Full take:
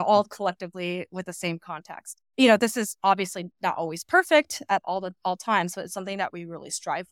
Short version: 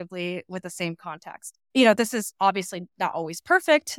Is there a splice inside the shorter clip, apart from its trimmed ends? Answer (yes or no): no